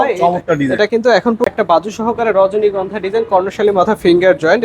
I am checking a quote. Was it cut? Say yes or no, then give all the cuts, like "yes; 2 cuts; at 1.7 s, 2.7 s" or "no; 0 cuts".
yes; 1 cut; at 1.5 s